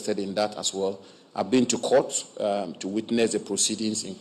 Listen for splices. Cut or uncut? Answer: uncut